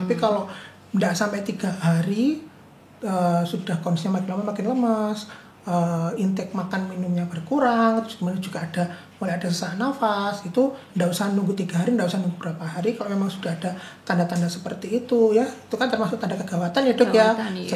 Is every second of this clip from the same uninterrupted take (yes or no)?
yes